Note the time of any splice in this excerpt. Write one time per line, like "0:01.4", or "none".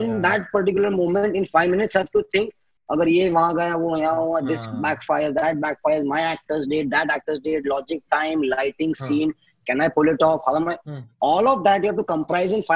none